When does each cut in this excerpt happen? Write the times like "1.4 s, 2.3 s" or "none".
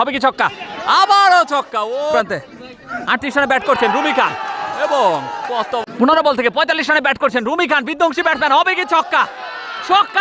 2.2 s, 5.9 s